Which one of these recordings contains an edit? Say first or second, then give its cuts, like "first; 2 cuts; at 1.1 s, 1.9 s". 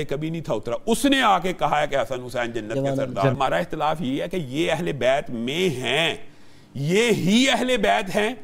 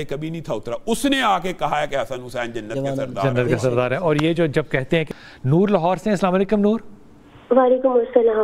first; 1 cut; at 3.3 s